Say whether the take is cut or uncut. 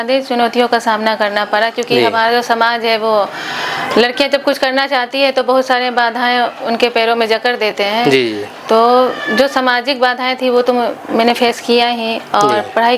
uncut